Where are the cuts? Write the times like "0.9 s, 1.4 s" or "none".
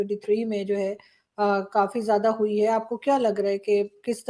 none

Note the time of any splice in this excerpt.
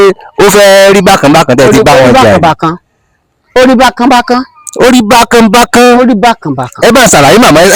none

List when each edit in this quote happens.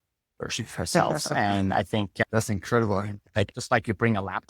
2.2 s, 3.5 s

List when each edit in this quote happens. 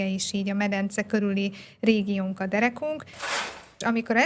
3.3 s

